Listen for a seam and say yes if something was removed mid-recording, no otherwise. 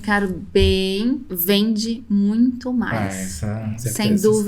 yes